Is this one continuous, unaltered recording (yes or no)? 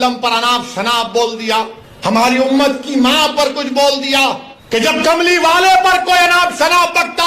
no